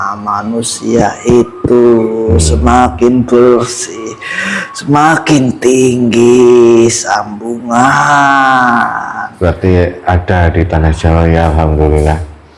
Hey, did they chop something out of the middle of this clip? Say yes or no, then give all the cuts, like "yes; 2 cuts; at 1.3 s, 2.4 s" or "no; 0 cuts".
no; 0 cuts